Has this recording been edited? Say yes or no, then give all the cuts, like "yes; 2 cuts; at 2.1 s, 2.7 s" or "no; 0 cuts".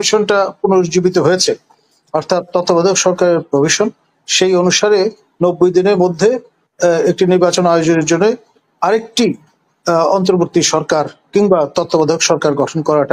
no; 0 cuts